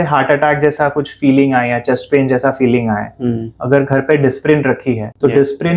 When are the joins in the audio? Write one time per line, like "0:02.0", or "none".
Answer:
none